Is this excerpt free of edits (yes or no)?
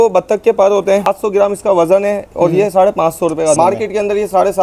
no